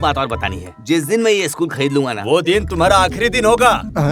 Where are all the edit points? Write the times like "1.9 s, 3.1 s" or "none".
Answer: none